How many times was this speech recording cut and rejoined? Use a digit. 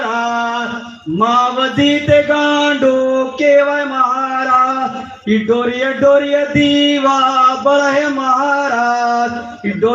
0